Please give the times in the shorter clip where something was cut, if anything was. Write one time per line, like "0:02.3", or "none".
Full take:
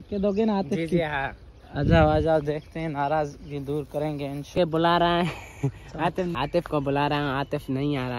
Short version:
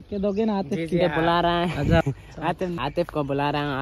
0:01.0